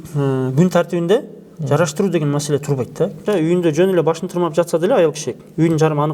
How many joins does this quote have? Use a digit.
1